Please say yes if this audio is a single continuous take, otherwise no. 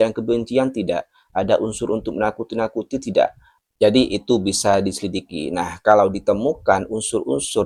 yes